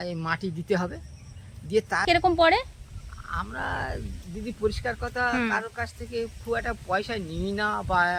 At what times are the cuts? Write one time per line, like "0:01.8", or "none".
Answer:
0:02.1